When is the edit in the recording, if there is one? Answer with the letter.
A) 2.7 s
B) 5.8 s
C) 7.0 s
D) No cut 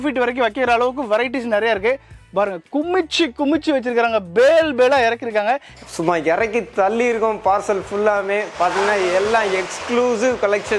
B